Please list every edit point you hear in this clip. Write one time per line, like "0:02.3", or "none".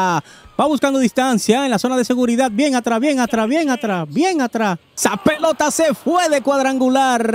0:04.9